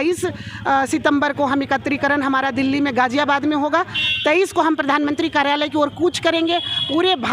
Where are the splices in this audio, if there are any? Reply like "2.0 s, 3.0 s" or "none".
none